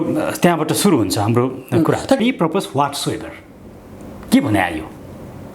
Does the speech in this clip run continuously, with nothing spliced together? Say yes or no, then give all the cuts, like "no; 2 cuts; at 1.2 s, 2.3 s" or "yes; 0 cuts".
no; 1 cut; at 2.2 s